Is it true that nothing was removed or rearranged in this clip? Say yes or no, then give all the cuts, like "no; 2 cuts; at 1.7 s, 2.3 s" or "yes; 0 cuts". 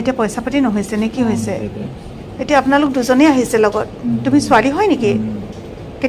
no; 1 cut; at 1.8 s